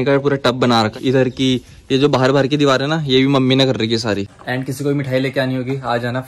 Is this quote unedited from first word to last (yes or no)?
no